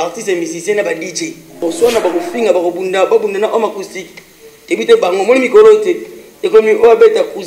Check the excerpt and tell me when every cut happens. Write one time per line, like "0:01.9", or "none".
0:01.6